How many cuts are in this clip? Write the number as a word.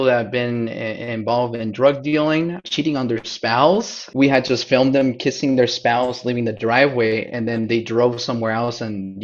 two